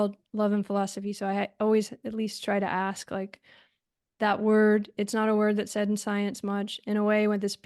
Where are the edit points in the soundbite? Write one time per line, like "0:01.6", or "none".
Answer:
none